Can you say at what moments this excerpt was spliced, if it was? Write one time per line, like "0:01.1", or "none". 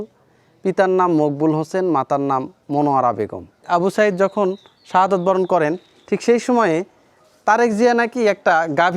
0:03.7